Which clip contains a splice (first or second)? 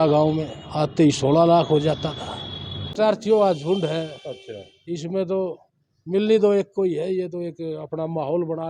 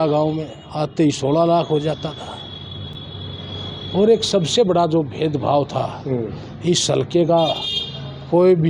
first